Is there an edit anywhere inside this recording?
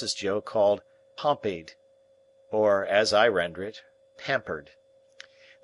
no; 0 cuts

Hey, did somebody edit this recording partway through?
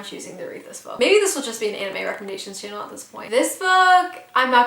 yes; 2 cuts; at 0.9 s, 3.3 s

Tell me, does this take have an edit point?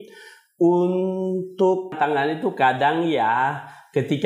yes; 1 cut; at 1.9 s

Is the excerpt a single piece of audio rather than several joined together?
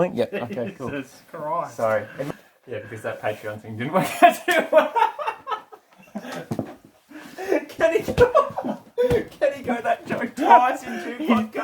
no; 1 cut; at 2.3 s

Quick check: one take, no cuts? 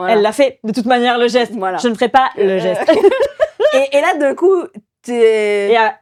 yes; 0 cuts

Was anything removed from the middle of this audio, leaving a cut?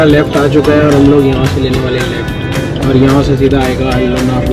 no; 0 cuts

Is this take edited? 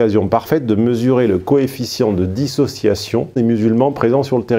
yes; 1 cut; at 3.4 s

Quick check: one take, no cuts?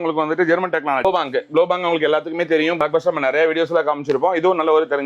no; 2 cuts; at 1.0 s, 2.8 s

